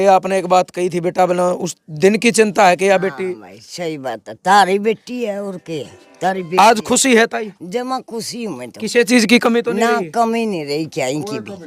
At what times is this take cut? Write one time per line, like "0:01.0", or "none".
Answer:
none